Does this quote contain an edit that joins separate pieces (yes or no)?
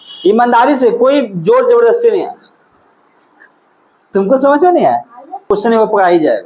yes